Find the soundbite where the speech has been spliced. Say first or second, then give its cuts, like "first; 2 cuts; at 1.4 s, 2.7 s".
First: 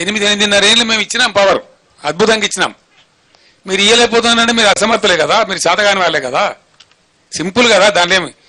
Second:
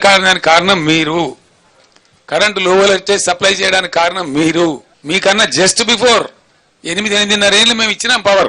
second; 1 cut; at 4.9 s